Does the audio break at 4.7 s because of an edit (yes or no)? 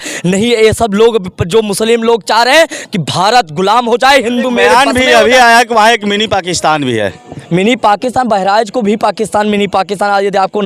yes